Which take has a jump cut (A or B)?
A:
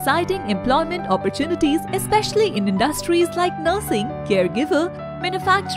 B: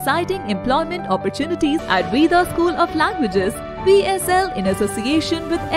B